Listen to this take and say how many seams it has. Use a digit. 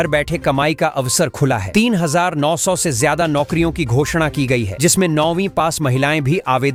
0